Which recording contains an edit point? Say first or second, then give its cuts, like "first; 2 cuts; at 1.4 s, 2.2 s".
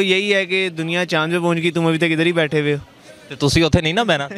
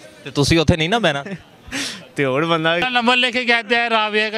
second; 1 cut; at 2.8 s